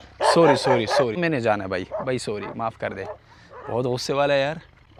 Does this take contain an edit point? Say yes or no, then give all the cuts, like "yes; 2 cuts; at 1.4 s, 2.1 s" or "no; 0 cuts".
no; 0 cuts